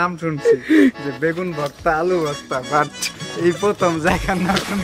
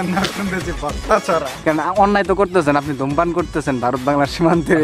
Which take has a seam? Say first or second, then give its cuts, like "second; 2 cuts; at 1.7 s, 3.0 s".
second; 1 cut; at 1.6 s